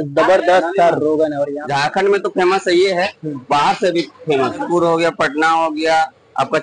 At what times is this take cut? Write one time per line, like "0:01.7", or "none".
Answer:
0:01.6
0:04.6